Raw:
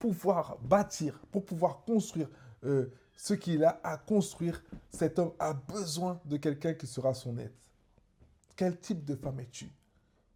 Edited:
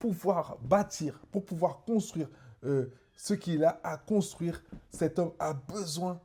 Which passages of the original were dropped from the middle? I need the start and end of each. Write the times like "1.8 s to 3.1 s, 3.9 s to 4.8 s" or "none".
none